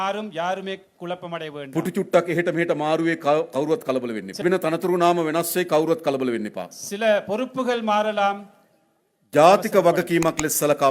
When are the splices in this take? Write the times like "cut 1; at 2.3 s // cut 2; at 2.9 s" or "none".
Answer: cut 1; at 4.4 s